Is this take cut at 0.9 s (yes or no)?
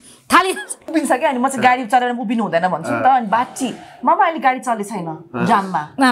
yes